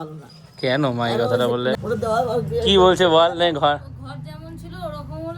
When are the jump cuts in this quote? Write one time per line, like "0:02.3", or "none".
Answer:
0:01.8

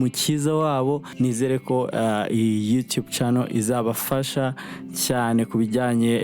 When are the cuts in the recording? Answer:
0:01.1

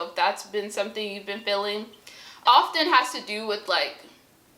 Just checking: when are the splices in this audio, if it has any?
0:02.3

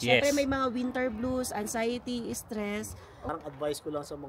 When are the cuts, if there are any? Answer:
0:03.2

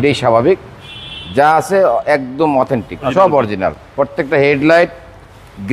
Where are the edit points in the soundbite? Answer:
0:03.1

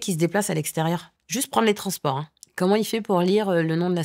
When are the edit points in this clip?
0:01.2
0:02.4

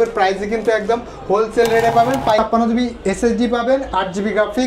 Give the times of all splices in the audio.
0:02.4

